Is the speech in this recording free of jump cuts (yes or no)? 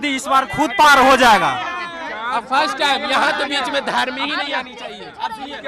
yes